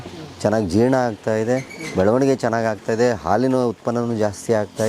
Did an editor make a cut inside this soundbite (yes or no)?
no